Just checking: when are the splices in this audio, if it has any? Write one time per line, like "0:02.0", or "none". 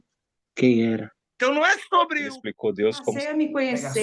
0:01.2